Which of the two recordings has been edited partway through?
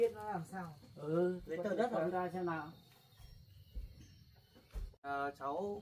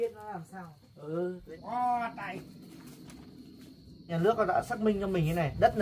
second; 2 cuts; at 1.5 s, 4.0 s

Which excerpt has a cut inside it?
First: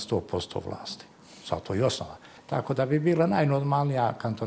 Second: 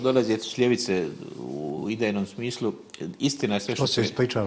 first; 1 cut; at 2.3 s

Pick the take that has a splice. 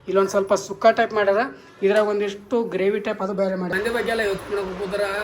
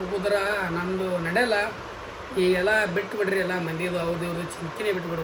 first; 1 cut; at 3.7 s

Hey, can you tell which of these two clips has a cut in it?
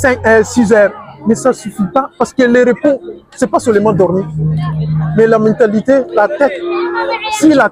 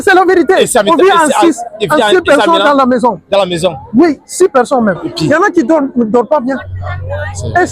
second; 1 cut; at 5.1 s

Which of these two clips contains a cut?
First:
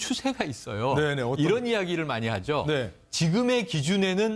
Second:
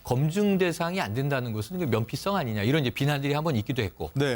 second; 1 cut; at 1.3 s

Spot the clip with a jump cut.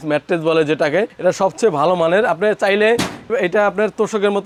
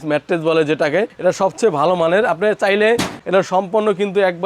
second; 1 cut; at 3.2 s

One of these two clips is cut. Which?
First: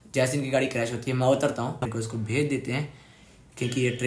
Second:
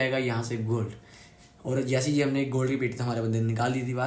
first; 1 cut; at 1.9 s

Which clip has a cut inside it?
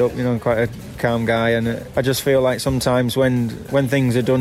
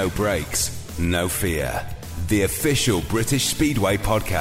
first; 2 cuts; at 1.8 s, 3.6 s

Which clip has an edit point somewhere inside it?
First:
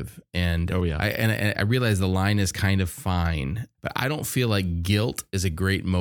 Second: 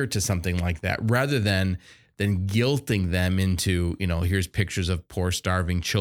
first; 2 cuts; at 1.0 s, 3.7 s

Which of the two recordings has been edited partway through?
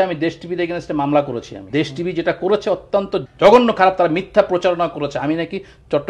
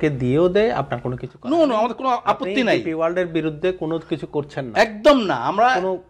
first; 2 cuts; at 1.5 s, 3.3 s

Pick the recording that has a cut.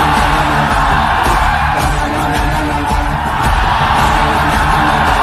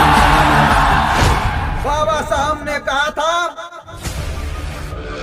second; 1 cut; at 1.4 s

